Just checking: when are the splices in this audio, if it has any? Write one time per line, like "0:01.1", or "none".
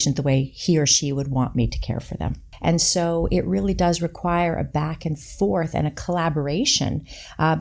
0:02.4